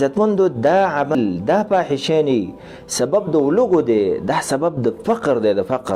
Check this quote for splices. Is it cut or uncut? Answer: cut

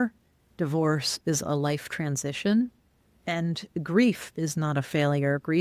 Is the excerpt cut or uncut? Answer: uncut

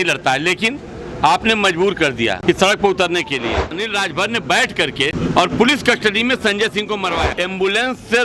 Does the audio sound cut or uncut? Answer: cut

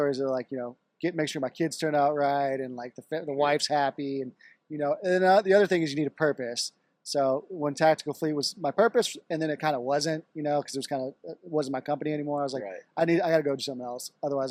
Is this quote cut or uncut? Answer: uncut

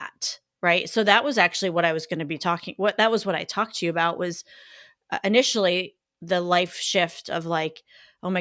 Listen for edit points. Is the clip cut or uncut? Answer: cut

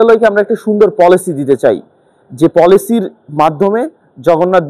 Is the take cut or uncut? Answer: uncut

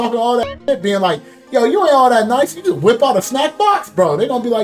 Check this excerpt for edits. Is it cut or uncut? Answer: uncut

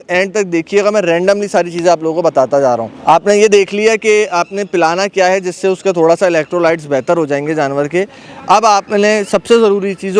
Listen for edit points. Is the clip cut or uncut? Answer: uncut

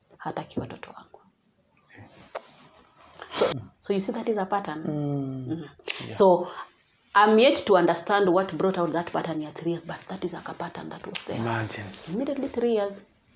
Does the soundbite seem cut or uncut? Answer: cut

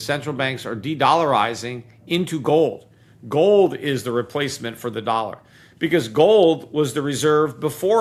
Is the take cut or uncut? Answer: uncut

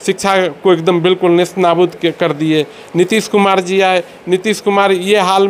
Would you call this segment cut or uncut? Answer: uncut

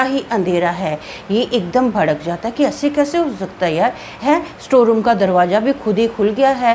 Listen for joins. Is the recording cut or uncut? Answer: uncut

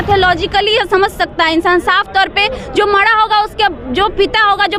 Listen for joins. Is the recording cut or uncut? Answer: uncut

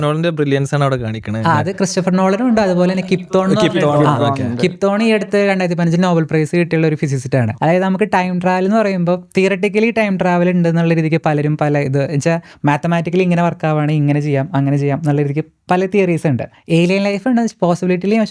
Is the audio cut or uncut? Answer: cut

